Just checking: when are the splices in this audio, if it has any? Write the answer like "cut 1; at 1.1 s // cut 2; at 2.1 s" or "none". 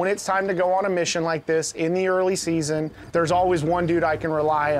cut 1; at 3.0 s